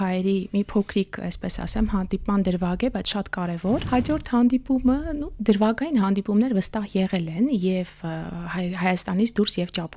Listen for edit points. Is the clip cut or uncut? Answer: cut